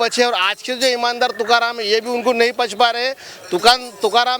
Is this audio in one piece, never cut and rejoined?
yes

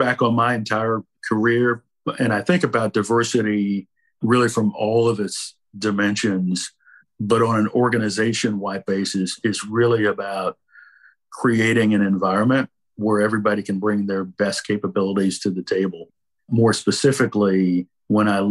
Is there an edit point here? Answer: yes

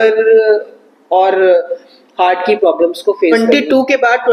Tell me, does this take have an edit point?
yes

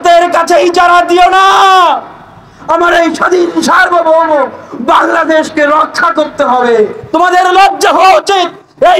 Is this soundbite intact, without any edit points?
no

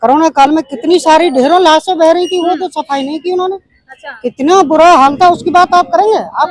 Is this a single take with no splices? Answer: yes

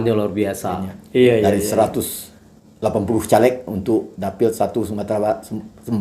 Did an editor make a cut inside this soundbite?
yes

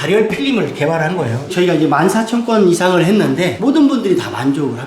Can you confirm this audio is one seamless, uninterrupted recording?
no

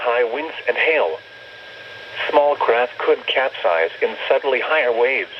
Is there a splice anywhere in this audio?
no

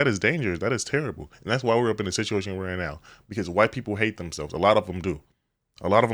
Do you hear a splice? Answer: no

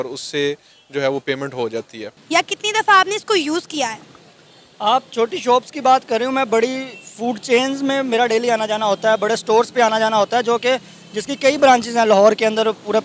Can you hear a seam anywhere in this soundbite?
yes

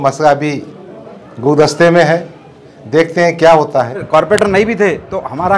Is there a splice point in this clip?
yes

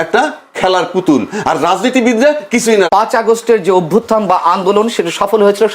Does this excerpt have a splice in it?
yes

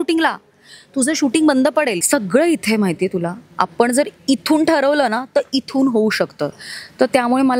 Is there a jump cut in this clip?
yes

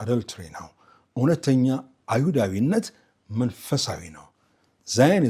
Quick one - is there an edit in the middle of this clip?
no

